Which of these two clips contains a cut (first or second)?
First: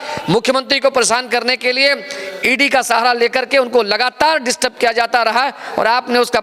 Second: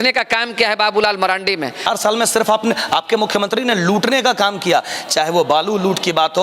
second